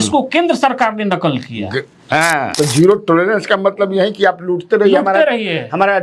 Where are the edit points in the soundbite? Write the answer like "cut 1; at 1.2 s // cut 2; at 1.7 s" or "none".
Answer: cut 1; at 2.5 s